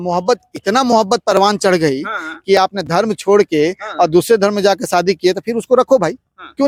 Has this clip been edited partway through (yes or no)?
no